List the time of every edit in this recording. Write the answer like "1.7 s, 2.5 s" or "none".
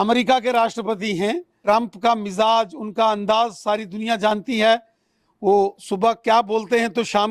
1.5 s